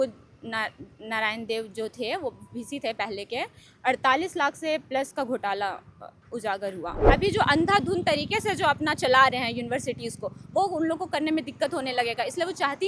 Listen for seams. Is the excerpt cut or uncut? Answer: cut